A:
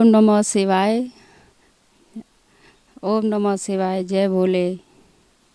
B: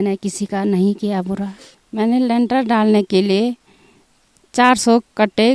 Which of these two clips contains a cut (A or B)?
B